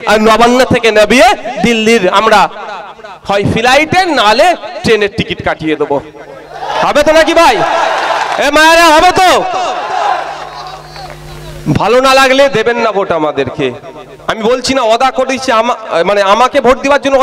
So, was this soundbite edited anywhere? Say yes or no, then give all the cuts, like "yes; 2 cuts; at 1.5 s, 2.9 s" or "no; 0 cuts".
no; 0 cuts